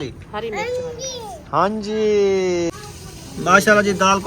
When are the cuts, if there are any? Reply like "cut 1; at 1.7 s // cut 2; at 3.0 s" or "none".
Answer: cut 1; at 2.8 s